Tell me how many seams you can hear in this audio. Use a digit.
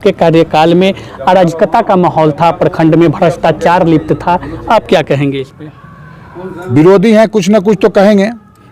0